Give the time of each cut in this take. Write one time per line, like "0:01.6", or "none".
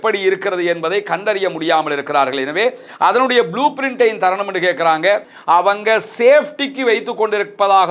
0:05.3